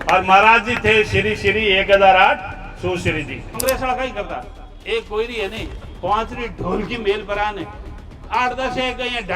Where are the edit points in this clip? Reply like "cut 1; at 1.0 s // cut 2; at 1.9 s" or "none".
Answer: cut 1; at 3.8 s